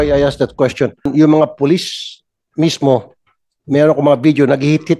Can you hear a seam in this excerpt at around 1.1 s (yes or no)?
yes